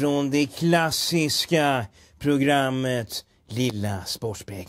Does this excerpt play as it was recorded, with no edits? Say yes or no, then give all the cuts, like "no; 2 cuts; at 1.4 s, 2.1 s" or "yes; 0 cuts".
yes; 0 cuts